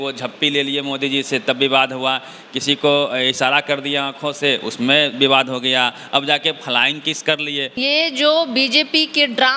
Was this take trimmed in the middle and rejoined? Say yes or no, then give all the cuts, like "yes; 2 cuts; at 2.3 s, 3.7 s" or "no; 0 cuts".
yes; 1 cut; at 7.8 s